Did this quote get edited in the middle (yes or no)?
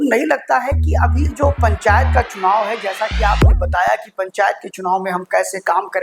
no